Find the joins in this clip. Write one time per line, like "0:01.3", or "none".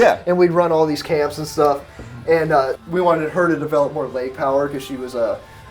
0:02.8